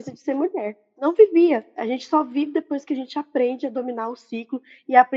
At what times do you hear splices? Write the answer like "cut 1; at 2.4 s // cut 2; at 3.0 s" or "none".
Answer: none